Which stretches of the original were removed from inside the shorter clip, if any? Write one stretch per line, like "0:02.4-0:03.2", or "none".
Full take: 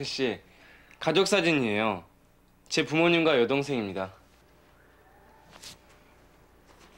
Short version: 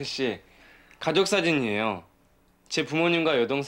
none